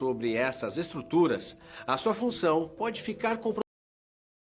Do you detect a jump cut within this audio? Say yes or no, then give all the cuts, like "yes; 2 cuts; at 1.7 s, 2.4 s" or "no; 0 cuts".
no; 0 cuts